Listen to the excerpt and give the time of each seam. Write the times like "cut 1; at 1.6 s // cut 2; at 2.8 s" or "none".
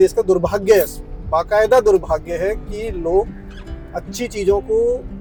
none